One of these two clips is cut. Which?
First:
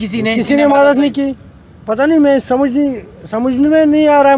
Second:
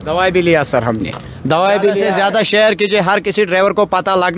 second; 1 cut; at 2.1 s

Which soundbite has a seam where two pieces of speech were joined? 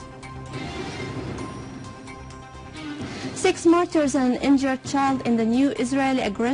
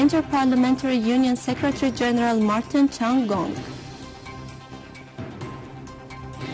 first; 1 cut; at 5.2 s

